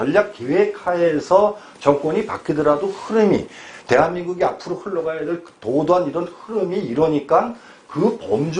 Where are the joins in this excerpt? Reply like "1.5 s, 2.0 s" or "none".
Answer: none